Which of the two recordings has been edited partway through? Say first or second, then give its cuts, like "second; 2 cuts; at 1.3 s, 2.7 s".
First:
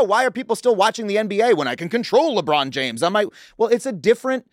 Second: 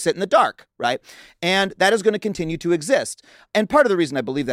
second; 1 cut; at 3.5 s